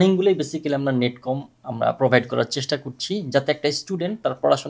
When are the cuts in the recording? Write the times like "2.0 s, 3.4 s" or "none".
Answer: none